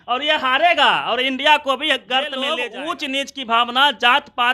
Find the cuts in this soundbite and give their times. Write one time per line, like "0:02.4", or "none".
0:02.6